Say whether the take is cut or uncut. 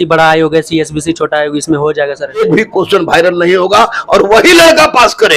cut